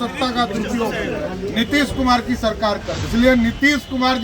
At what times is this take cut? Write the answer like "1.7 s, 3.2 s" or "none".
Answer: 2.9 s